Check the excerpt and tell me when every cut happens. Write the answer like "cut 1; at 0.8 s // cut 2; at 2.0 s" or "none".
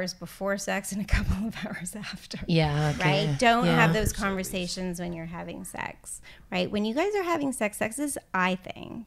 none

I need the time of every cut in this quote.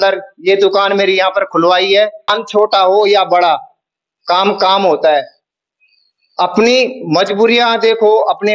cut 1; at 2.4 s

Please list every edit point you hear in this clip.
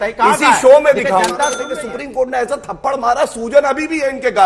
cut 1; at 1.6 s

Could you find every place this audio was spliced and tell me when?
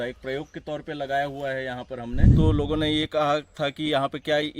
cut 1; at 2.2 s

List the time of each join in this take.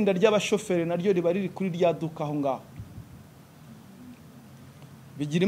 none

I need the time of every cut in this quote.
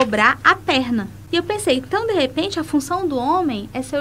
cut 1; at 1.2 s

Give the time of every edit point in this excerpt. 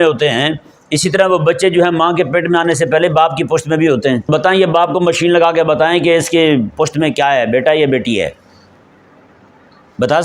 cut 1; at 4.2 s

